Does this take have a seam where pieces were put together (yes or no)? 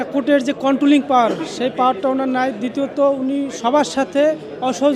no